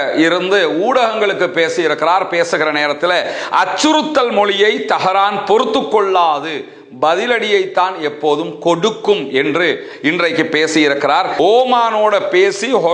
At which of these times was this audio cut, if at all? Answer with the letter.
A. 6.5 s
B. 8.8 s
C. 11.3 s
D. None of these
C